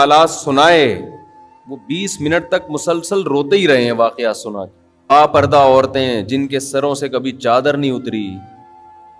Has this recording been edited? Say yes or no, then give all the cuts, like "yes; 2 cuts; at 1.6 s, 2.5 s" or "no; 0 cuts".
yes; 1 cut; at 5.1 s